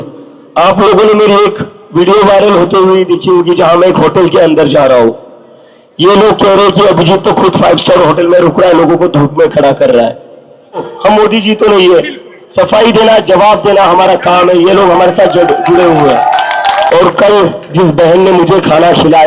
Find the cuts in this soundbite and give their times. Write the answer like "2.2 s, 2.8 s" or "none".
10.9 s, 16.9 s

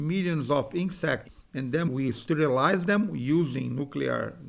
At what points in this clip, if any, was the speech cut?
1.4 s

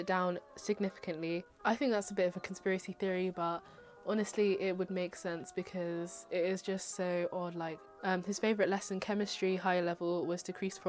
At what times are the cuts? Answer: 1.4 s, 8.0 s

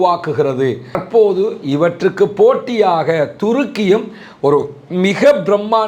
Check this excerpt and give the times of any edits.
1.0 s

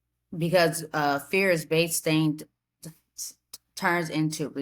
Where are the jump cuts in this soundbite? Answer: none

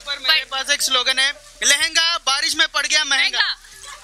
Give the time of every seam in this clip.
none

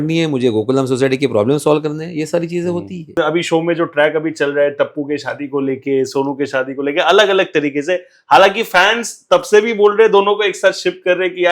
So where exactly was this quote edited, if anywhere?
3.1 s

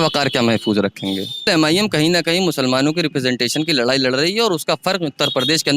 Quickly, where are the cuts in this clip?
1.5 s

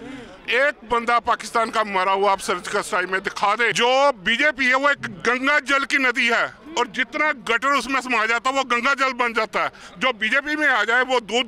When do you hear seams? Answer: 3.7 s, 9.8 s

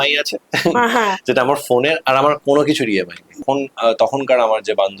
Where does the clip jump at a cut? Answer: 3.4 s

